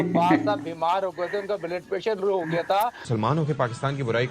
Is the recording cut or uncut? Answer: cut